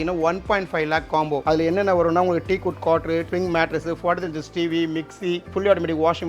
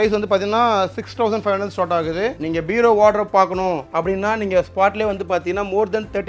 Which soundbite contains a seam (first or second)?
second